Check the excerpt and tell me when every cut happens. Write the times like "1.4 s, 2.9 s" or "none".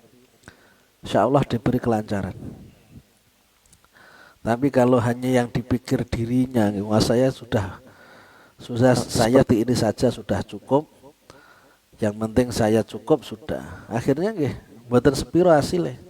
9.5 s